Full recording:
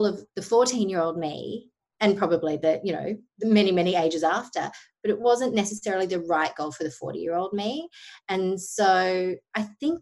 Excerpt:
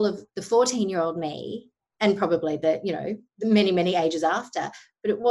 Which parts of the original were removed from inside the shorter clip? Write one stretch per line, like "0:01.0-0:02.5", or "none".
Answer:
none